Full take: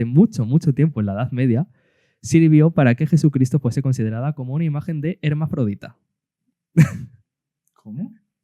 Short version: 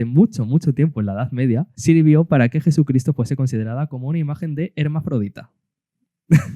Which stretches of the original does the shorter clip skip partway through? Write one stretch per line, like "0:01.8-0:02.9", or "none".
0:01.7-0:02.2